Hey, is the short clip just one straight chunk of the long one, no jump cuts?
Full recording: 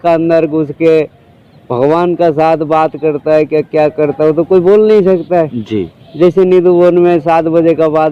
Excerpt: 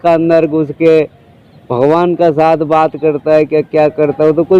yes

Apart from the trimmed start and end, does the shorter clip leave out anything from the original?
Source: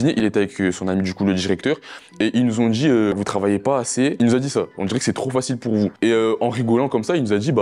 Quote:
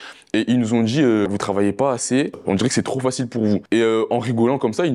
yes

